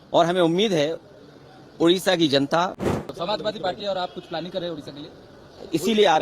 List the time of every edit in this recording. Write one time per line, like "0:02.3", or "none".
0:03.1